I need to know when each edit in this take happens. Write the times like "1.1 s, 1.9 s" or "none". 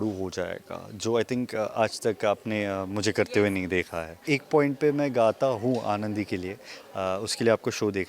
4.2 s